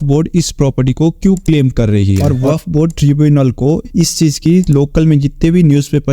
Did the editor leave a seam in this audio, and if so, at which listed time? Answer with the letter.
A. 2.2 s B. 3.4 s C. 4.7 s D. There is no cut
A